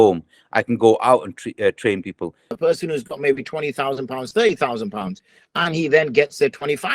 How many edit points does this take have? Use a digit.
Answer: 1